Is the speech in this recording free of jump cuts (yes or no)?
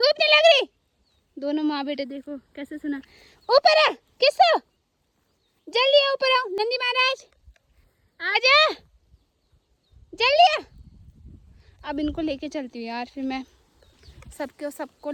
yes